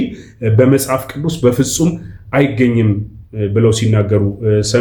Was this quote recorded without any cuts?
yes; 0 cuts

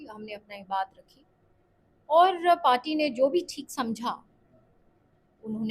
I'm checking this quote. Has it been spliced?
no; 0 cuts

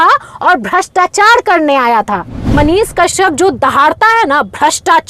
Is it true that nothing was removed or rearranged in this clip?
no; 1 cut; at 2.5 s

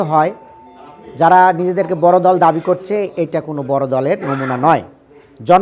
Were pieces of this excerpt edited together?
no; 0 cuts

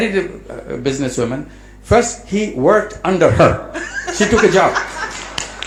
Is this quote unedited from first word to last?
yes; 0 cuts

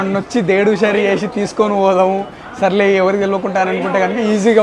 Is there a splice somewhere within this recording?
no; 0 cuts

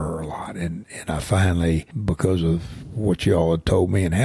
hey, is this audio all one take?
no; 1 cut; at 1.9 s

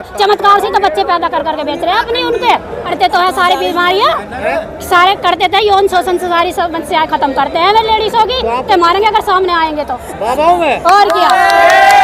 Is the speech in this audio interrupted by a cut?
yes; 2 cuts; at 2.9 s, 8.7 s

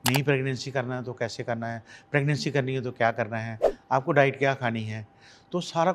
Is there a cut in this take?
no; 0 cuts

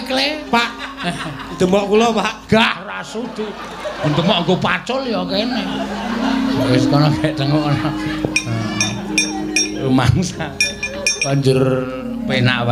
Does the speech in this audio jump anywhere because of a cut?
no; 0 cuts

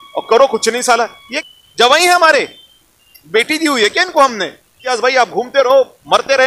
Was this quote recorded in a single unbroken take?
no; 2 cuts; at 1.2 s, 4.8 s

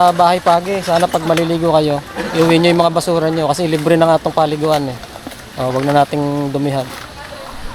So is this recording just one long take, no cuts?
yes; 0 cuts

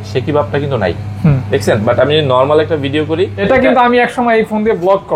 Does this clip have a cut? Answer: yes; 1 cut; at 3.4 s

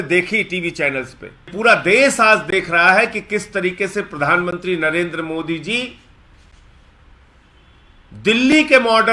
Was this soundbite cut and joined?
yes; 1 cut; at 1.5 s

